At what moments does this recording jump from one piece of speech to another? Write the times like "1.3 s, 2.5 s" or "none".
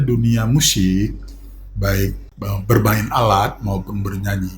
2.3 s